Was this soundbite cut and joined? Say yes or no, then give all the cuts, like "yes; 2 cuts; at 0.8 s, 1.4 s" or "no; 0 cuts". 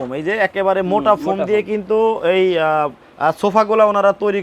yes; 1 cut; at 3.0 s